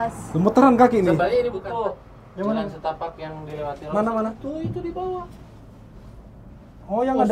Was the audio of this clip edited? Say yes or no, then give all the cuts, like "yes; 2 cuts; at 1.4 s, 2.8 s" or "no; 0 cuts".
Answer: yes; 1 cut; at 1.6 s